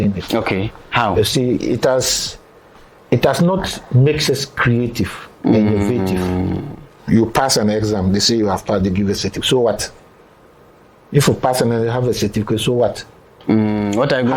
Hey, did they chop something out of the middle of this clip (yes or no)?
no